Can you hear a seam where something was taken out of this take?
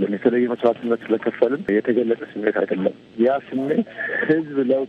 yes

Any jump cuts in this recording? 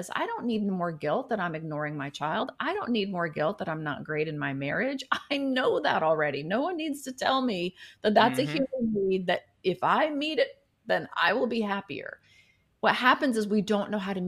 no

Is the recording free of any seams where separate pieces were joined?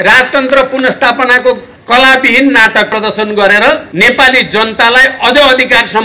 no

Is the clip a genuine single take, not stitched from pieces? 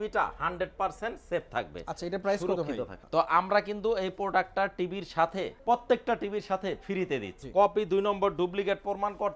no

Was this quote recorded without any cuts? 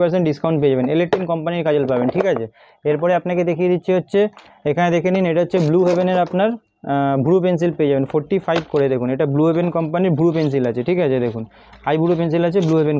yes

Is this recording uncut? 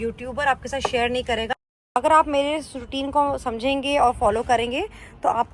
no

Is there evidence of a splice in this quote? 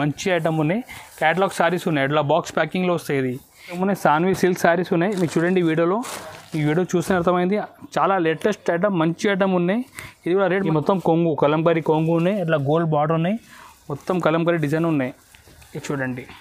yes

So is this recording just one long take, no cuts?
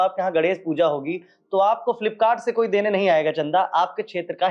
yes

